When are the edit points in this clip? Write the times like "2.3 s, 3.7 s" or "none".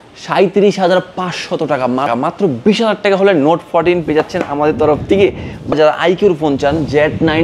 2.1 s, 5.7 s